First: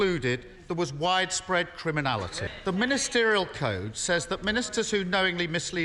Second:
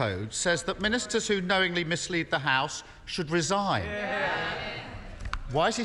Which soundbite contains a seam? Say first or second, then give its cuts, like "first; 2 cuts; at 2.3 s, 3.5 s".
first; 1 cut; at 2.4 s